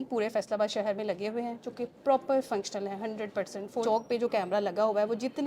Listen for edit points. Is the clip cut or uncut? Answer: cut